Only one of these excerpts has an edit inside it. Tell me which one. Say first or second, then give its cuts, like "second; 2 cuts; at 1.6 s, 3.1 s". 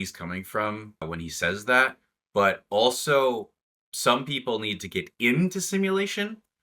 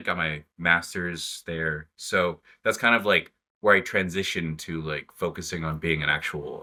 first; 1 cut; at 1.0 s